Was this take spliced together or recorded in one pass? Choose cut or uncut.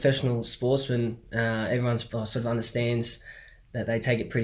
cut